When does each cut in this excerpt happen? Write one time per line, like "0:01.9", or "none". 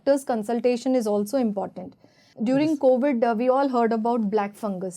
0:02.3